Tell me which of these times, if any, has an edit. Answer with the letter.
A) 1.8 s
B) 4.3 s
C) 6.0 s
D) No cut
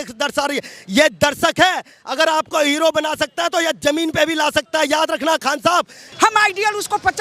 C